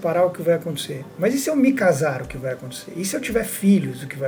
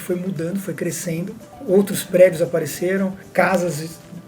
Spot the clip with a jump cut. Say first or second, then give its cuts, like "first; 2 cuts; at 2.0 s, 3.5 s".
second; 2 cuts; at 1.5 s, 3.2 s